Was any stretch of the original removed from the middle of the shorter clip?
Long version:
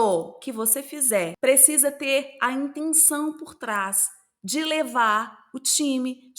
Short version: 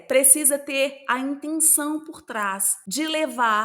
yes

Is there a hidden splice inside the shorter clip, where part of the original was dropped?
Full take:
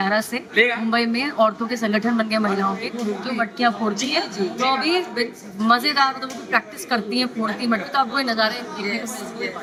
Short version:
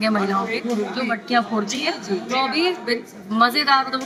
no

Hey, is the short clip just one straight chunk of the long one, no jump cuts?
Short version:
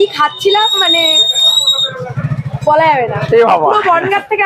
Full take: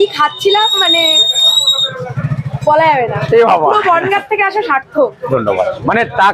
yes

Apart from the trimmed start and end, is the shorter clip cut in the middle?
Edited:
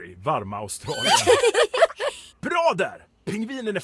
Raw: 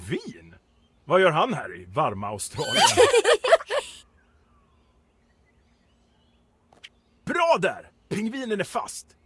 yes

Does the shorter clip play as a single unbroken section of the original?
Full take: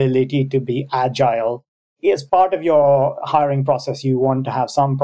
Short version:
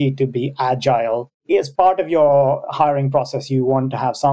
no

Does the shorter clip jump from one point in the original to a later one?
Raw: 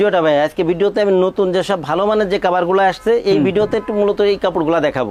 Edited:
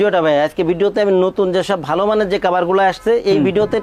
no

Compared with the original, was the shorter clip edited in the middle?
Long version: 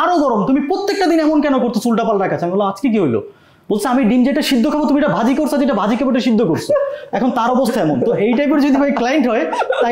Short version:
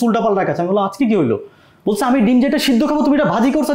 no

